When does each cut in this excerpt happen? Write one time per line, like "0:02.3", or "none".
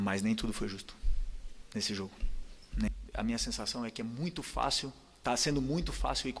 0:02.9